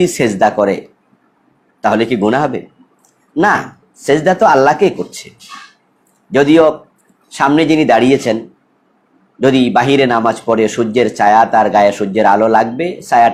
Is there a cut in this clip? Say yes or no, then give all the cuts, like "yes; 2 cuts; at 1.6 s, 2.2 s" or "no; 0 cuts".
no; 0 cuts